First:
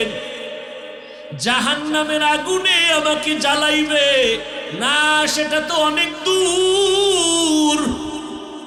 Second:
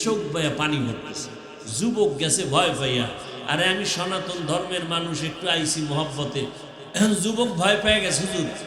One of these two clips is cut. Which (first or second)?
second